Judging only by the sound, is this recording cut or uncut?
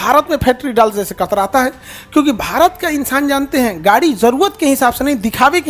uncut